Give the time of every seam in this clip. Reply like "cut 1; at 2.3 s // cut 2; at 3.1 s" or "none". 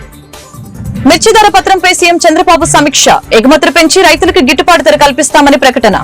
cut 1; at 1.0 s